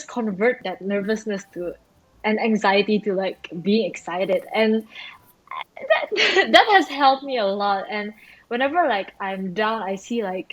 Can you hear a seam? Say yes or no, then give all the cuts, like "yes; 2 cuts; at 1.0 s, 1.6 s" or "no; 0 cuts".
no; 0 cuts